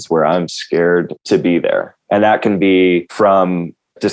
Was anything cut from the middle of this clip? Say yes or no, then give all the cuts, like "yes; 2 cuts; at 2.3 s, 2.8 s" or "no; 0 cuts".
yes; 2 cuts; at 1.9 s, 3.1 s